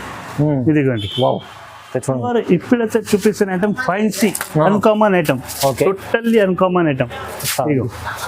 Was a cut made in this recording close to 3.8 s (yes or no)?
no